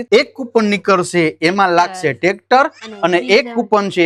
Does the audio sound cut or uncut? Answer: uncut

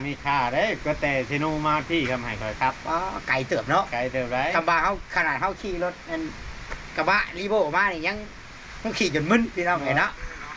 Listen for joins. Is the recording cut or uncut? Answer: uncut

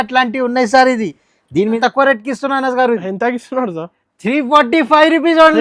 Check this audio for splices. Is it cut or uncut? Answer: cut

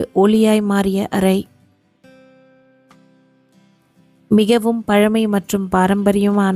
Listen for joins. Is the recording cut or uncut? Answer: uncut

